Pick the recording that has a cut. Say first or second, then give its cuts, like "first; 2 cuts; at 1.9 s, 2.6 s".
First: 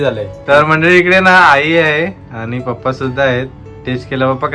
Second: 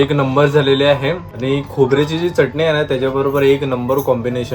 second; 1 cut; at 1.3 s